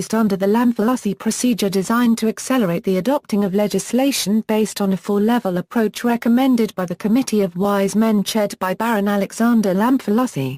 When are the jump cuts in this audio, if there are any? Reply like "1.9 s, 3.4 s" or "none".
7.6 s